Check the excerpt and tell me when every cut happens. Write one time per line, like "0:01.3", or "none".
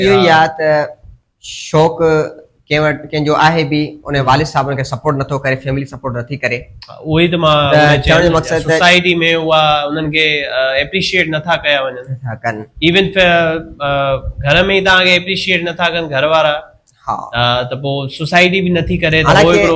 none